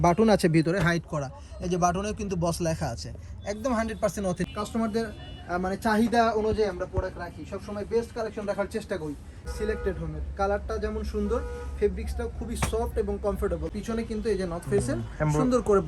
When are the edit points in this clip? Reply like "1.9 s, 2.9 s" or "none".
4.5 s, 9.5 s, 13.7 s